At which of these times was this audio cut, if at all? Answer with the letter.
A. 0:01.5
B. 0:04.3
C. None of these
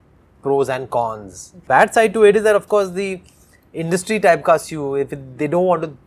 A